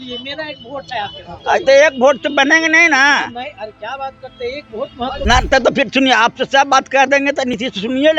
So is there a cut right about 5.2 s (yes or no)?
yes